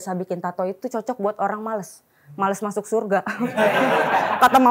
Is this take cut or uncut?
uncut